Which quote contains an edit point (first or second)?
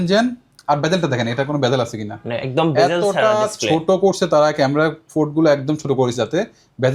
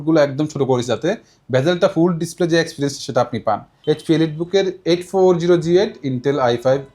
second